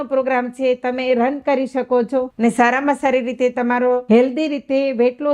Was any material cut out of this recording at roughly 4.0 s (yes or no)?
yes